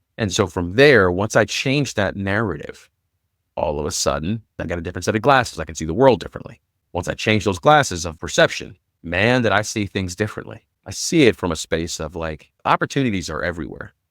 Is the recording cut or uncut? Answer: cut